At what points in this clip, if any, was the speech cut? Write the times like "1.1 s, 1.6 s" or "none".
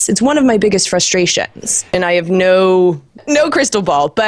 2.0 s, 3.2 s